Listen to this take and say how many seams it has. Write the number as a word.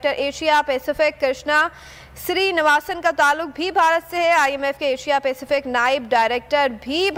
zero